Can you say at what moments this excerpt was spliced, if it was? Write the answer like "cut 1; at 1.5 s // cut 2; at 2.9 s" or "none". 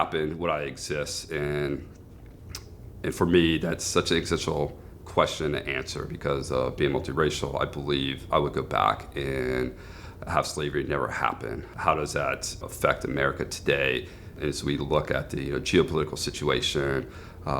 cut 1; at 11.7 s // cut 2; at 12.6 s // cut 3; at 14.3 s